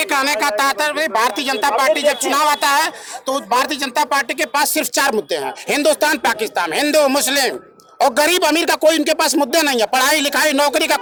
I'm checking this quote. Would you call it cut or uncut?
uncut